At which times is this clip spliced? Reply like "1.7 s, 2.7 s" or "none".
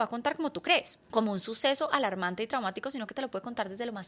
1.0 s